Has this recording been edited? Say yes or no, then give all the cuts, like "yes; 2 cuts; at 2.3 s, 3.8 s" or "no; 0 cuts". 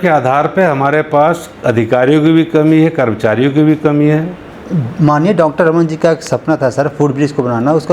yes; 1 cut; at 4.4 s